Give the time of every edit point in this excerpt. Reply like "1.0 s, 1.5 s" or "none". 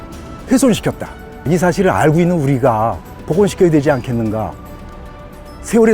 1.4 s